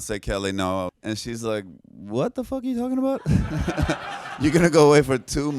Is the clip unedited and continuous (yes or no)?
no